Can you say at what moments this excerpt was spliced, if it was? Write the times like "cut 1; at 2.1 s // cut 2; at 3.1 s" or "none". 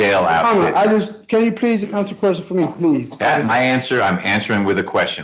none

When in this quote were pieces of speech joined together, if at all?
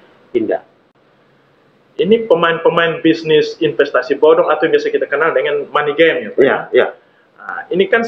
cut 1; at 0.9 s

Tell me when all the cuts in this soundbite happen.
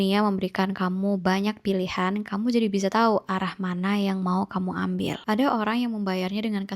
cut 1; at 5.2 s

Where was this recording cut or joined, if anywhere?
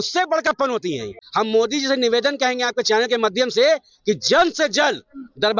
cut 1; at 1.2 s

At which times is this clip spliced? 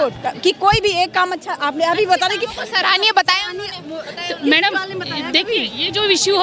none

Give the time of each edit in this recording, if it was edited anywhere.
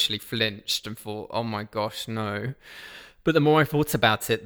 none

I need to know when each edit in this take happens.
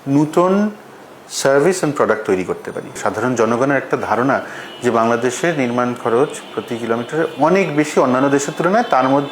cut 1; at 3.0 s

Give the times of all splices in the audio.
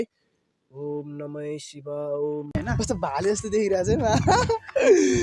cut 1; at 2.5 s

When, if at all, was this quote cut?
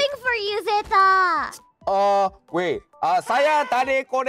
cut 1; at 1.7 s

